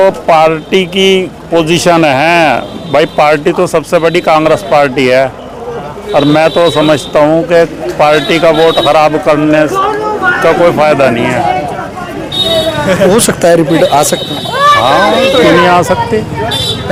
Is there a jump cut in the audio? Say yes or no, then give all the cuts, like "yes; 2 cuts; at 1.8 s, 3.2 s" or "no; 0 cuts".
no; 0 cuts